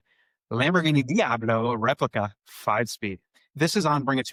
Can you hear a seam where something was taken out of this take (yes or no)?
no